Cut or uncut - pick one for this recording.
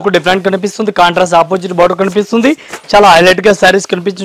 uncut